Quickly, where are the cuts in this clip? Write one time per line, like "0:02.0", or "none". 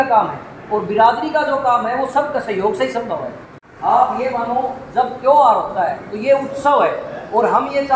none